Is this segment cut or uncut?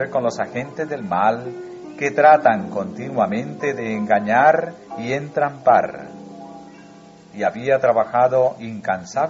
uncut